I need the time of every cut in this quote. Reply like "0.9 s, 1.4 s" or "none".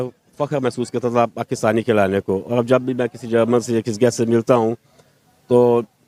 none